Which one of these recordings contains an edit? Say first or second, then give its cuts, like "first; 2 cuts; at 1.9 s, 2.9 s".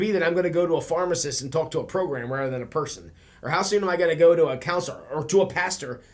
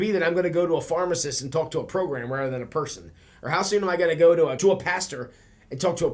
second; 1 cut; at 4.6 s